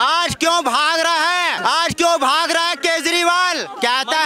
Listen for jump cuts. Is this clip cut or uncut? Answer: cut